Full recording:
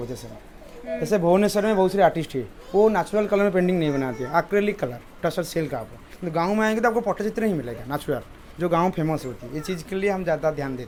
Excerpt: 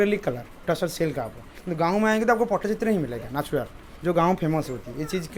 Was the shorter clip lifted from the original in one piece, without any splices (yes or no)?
yes